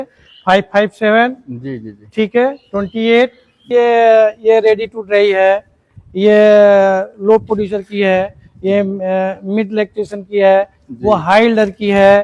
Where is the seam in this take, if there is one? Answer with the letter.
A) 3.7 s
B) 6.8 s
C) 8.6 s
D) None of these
A